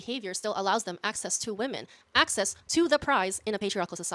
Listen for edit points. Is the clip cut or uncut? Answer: uncut